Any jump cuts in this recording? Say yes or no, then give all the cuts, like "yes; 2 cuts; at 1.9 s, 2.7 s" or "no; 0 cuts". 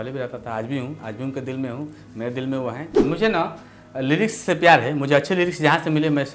yes; 1 cut; at 3.0 s